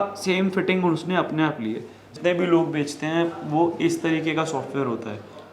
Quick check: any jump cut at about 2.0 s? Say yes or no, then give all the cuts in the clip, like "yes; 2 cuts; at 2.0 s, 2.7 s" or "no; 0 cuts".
yes; 1 cut; at 2.0 s